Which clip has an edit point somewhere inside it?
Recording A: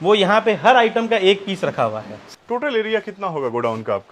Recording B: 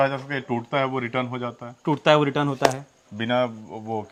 A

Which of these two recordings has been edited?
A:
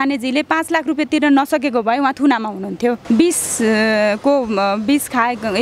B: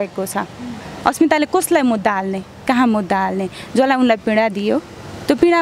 A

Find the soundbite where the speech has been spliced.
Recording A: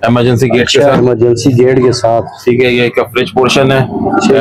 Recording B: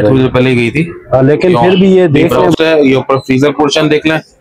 B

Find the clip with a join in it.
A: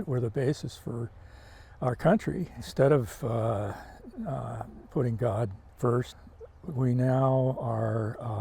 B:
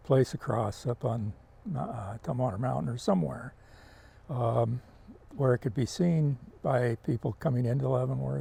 A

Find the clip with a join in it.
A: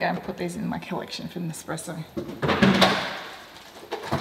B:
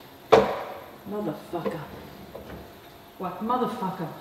A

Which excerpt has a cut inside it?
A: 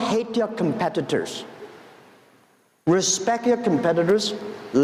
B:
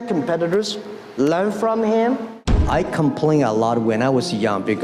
B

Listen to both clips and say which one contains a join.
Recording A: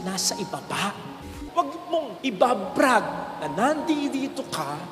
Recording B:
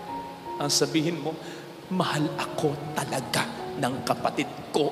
A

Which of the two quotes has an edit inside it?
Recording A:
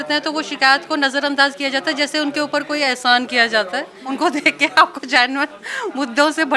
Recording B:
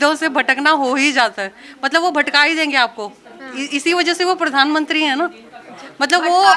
A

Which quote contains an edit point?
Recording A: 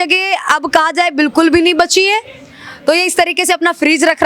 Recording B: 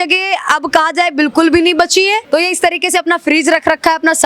B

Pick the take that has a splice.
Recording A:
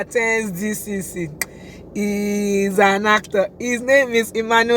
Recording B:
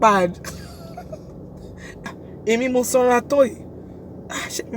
B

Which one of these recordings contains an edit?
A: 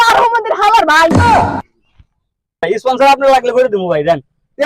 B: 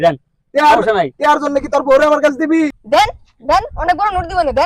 A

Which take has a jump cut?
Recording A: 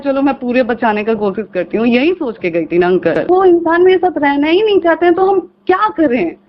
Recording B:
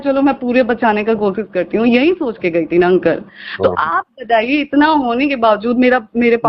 A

